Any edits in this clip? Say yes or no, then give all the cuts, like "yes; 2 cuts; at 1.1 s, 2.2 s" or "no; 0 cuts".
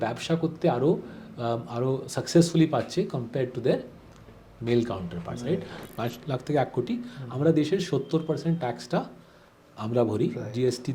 yes; 1 cut; at 5.9 s